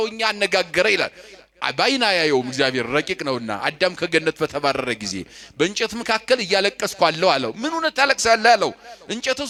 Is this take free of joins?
yes; 0 cuts

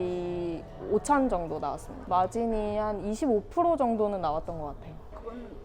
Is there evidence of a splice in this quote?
yes; 1 cut; at 2.0 s

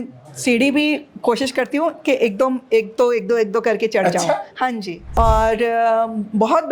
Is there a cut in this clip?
yes; 1 cut; at 5.0 s

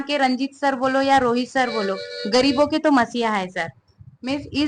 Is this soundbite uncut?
yes; 0 cuts

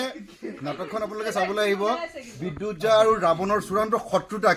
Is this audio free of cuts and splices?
yes; 0 cuts

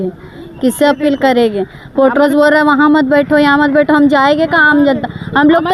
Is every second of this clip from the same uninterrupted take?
yes; 0 cuts

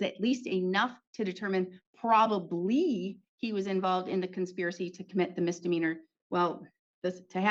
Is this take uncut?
yes; 0 cuts

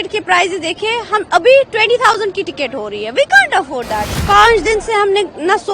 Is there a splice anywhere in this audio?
yes; 1 cut; at 4.1 s

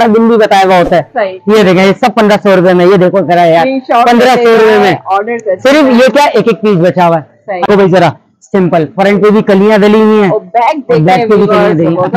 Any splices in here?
yes; 1 cut; at 7.7 s

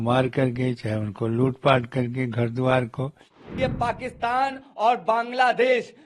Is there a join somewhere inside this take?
yes; 1 cut; at 3.4 s

